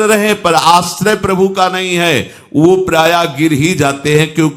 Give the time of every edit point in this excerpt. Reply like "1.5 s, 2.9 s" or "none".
none